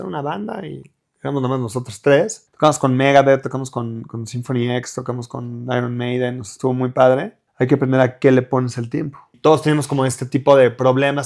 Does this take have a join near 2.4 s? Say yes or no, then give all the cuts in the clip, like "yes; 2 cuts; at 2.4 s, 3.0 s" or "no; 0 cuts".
yes; 3 cuts; at 2.4 s, 7.4 s, 9.4 s